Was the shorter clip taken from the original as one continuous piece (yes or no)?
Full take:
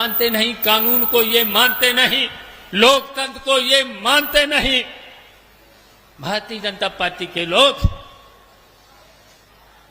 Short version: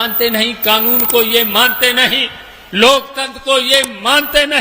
yes